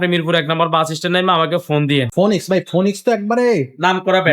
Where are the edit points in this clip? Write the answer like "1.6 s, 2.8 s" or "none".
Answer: 2.1 s